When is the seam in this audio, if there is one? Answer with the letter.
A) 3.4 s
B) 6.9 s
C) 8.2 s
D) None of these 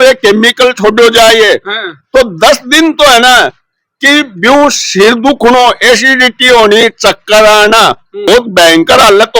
C